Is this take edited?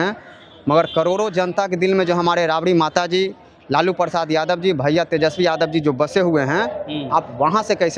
no; 0 cuts

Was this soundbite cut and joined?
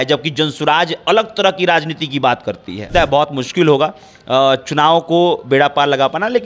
yes; 1 cut; at 2.9 s

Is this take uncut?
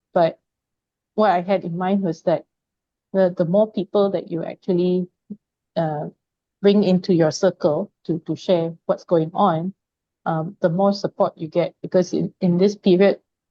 yes; 0 cuts

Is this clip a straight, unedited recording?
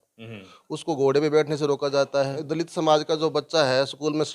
no; 1 cut; at 2.4 s

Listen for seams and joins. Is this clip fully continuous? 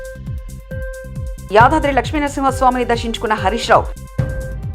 no; 1 cut; at 1.2 s

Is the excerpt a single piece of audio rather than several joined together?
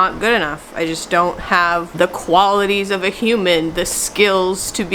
no; 1 cut; at 1.9 s

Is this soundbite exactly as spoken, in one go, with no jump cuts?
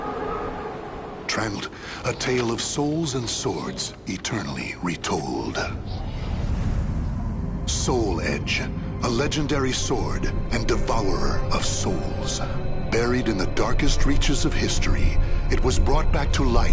no; 1 cut; at 1.6 s

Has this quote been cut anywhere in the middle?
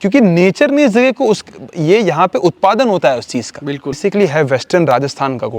yes; 1 cut; at 4.0 s

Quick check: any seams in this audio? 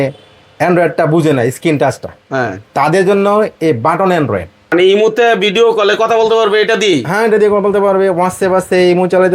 yes; 1 cut; at 4.7 s

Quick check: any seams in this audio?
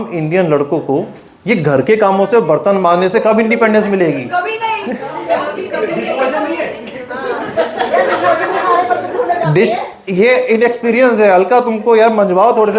no; 0 cuts

